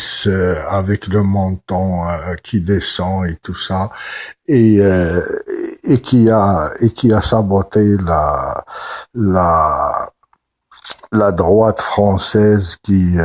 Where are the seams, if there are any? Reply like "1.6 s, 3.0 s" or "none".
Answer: none